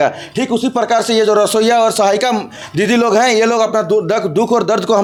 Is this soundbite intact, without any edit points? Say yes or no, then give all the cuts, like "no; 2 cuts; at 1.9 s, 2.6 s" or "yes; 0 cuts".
yes; 0 cuts